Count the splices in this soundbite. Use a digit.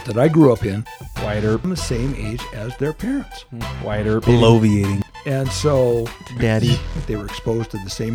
1